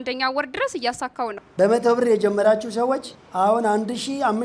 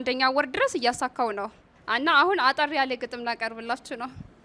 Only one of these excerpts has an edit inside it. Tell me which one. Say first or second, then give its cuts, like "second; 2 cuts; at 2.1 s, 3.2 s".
first; 2 cuts; at 1.4 s, 3.2 s